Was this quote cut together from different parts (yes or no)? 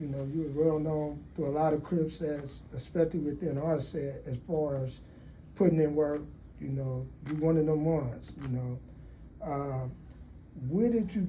no